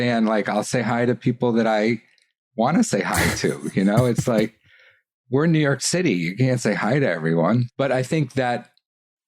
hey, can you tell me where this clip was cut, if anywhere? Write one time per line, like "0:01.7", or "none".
0:07.7